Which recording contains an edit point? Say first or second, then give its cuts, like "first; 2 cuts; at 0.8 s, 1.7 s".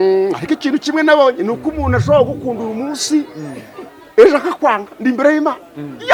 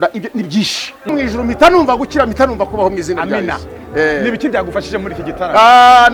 second; 1 cut; at 1.1 s